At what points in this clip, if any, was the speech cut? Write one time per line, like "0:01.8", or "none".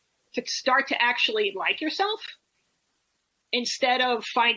none